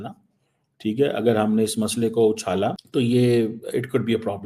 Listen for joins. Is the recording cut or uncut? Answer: cut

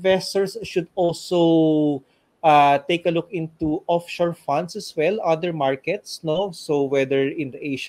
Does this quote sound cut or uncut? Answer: uncut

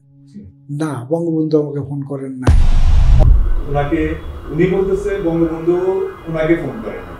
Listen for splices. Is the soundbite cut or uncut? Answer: uncut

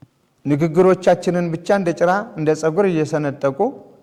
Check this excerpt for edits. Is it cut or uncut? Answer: uncut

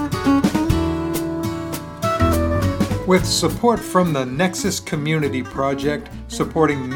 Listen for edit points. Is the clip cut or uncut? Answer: cut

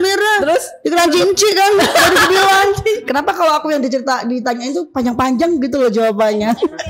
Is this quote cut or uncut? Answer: cut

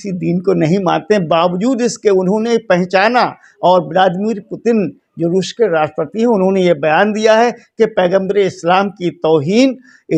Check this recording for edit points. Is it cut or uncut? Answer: uncut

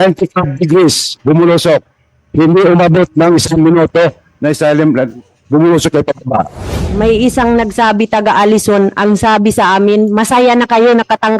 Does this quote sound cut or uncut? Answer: cut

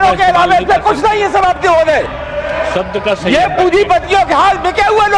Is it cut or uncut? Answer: uncut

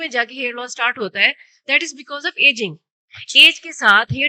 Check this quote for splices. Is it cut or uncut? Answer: uncut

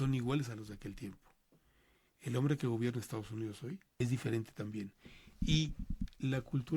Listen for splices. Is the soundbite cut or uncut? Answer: cut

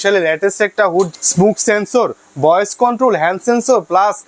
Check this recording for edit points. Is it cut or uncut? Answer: cut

